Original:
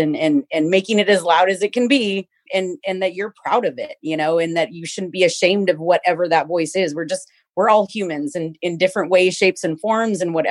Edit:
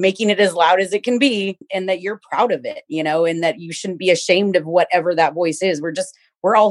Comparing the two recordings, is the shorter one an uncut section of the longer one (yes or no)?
no